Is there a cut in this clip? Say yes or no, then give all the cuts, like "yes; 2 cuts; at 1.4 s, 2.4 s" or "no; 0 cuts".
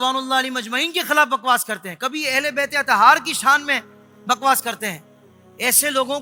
no; 0 cuts